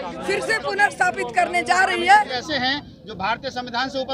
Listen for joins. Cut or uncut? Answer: cut